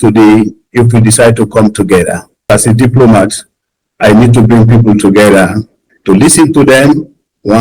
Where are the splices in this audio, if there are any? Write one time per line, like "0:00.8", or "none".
0:02.5